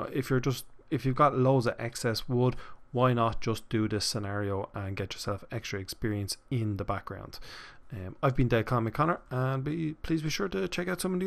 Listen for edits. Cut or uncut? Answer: uncut